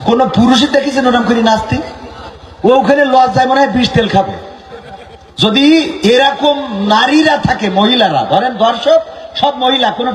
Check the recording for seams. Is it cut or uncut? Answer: uncut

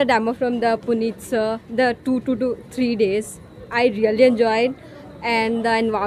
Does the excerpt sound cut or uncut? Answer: uncut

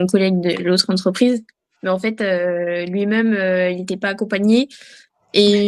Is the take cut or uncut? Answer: uncut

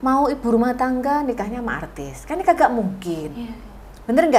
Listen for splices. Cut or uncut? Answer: uncut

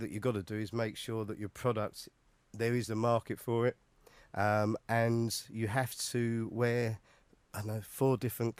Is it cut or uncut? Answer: uncut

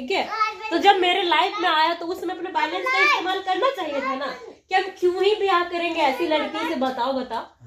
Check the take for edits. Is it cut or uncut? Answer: uncut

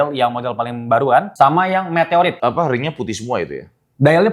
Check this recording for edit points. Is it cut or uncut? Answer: cut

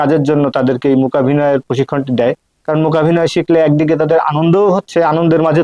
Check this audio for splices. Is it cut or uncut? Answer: uncut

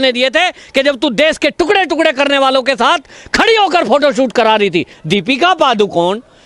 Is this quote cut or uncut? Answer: cut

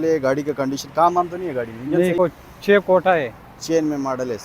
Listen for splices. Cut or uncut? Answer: cut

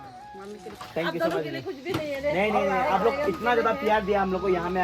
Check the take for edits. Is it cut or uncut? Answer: uncut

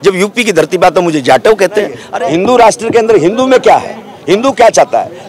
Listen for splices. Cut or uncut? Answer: cut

